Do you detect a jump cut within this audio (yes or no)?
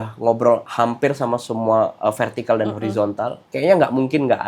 yes